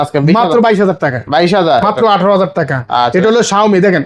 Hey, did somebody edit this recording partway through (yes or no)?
yes